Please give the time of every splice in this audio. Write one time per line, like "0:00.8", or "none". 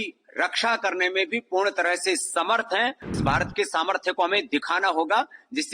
0:03.2